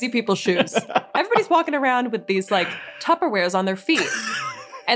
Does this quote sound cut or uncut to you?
uncut